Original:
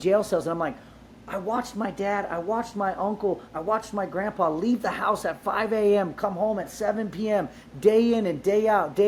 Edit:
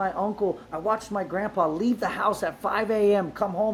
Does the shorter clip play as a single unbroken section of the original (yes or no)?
yes